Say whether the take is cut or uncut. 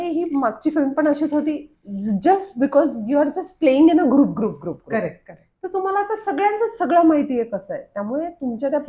uncut